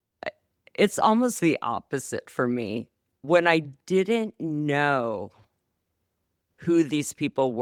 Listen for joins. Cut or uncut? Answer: uncut